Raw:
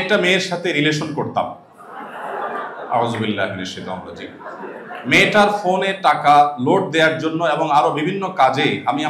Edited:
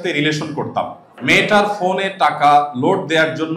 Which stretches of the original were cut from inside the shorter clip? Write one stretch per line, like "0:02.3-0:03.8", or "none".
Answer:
0:01.7-0:04.9